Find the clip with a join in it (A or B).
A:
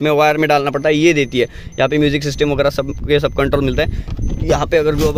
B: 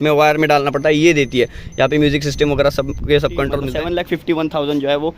B